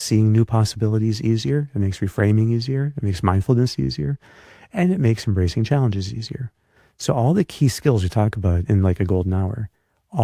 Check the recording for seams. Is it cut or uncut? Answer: uncut